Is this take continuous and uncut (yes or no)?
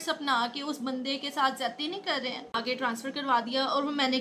no